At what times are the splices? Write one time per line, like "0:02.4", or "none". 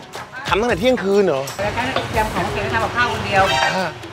0:01.6